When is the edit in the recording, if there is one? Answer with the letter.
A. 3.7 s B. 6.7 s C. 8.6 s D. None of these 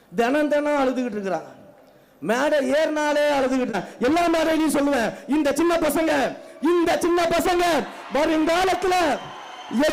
A